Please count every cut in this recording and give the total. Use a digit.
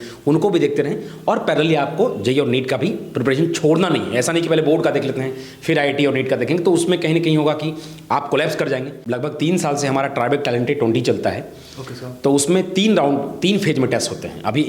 1